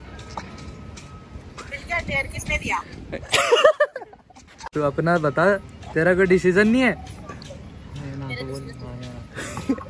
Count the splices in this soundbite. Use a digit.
1